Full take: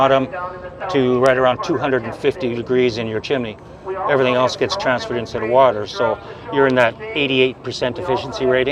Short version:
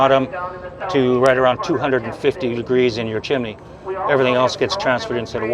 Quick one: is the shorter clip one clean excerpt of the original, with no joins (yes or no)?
yes